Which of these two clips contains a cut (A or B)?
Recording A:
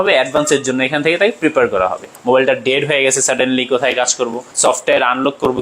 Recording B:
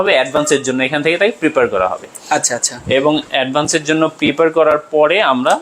A